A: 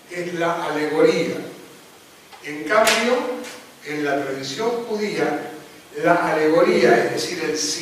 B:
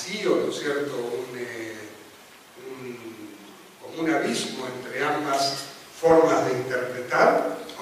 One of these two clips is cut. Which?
A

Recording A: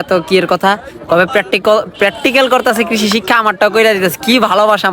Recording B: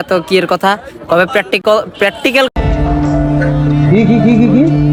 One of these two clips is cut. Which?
A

